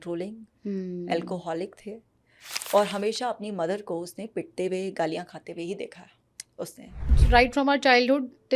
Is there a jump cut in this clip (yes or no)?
yes